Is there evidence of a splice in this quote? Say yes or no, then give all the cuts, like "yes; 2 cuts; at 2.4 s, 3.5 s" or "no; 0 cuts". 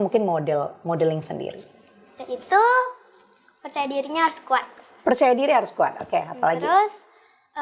no; 0 cuts